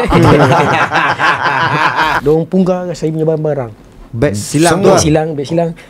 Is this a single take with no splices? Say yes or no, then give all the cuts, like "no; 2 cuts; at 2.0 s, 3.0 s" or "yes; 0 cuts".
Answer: no; 1 cut; at 2.2 s